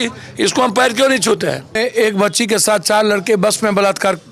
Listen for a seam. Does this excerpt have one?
yes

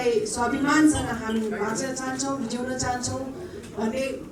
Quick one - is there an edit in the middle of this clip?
no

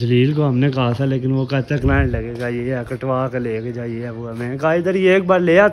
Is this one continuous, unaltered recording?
yes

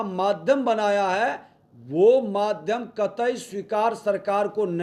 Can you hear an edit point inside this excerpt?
no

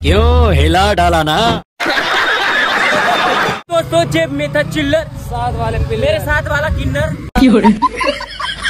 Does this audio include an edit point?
yes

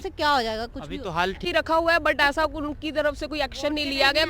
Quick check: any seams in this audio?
yes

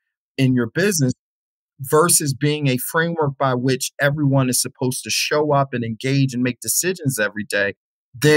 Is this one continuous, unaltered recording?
yes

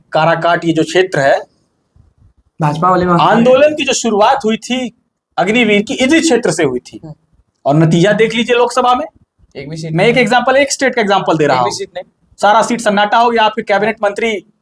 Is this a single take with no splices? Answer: yes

